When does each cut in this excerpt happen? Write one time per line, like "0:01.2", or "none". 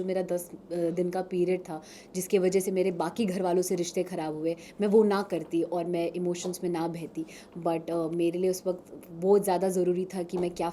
none